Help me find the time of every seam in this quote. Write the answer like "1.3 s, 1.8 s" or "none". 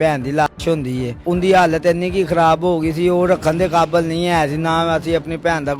1.1 s

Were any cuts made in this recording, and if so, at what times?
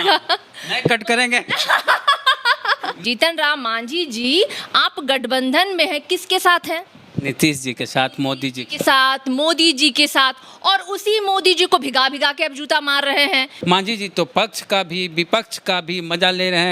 3.0 s, 13.5 s

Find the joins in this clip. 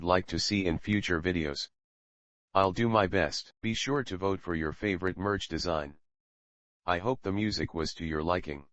3.4 s

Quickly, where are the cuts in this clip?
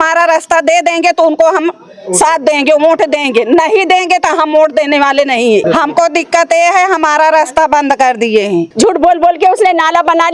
5.6 s, 8.7 s

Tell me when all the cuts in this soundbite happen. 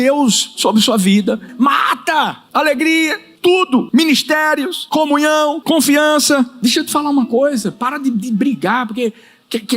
1.5 s, 2.4 s, 3.6 s, 4.8 s, 5.6 s, 6.5 s

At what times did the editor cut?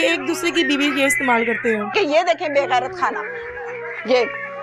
1.9 s

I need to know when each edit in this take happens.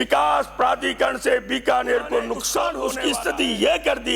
2.8 s

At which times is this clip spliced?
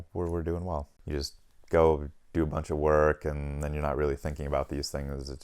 0.9 s

